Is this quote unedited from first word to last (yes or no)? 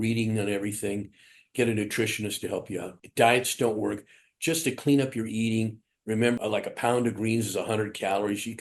no